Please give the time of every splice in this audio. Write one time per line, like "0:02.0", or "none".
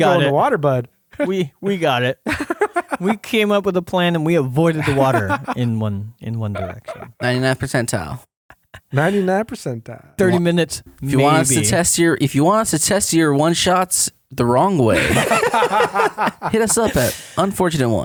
none

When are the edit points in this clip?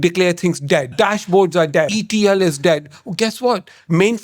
0:00.9
0:01.9

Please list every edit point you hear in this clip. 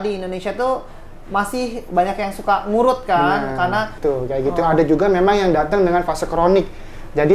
0:04.0

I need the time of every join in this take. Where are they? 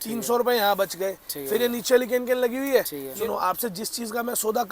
0:03.2

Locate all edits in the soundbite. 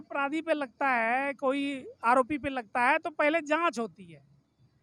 none

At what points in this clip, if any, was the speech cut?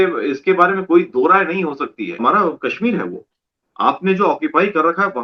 0:02.2

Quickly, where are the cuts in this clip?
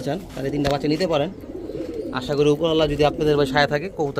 none

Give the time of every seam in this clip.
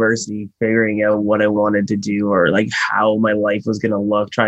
none

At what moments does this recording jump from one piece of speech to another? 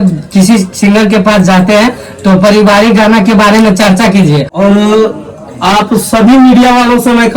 0:04.5

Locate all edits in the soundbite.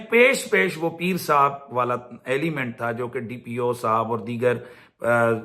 none

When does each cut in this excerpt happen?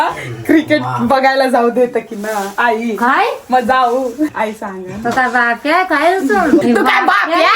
0:04.3
0:06.6

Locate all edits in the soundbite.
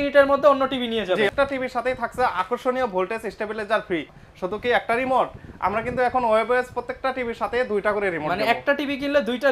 0:01.3
0:04.2

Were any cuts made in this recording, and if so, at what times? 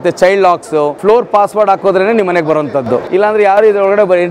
0:01.0
0:03.1

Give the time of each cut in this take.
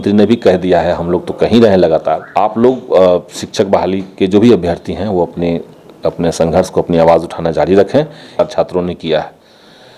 0:02.3
0:08.4

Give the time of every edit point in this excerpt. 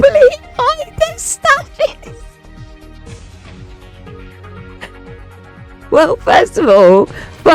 none

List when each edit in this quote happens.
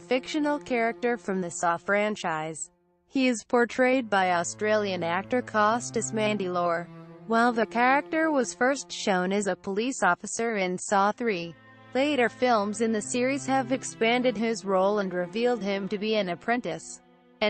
0:16.6

